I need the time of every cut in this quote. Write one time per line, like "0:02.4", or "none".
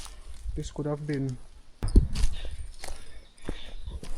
0:01.9